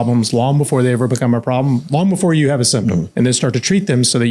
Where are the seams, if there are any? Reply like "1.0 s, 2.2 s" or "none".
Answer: 3.1 s